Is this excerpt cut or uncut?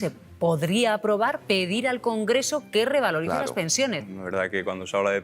cut